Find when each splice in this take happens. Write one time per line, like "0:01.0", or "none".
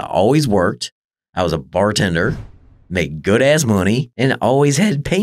0:04.1